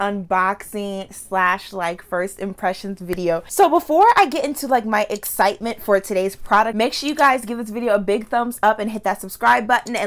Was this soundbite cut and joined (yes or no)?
yes